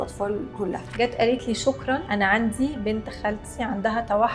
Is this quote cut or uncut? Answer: cut